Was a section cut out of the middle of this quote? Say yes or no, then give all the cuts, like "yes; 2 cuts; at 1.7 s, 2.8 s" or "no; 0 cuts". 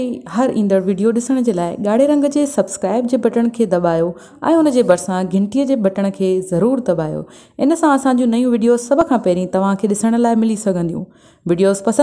no; 0 cuts